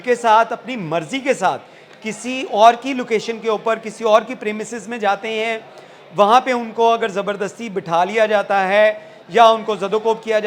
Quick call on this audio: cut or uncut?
uncut